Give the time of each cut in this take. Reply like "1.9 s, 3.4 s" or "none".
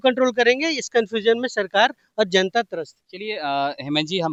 none